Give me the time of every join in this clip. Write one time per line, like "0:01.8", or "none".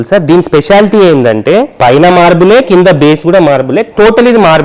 0:01.7